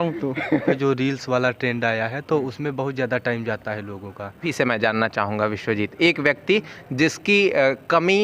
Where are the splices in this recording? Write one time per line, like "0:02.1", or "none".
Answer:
0:00.8
0:04.5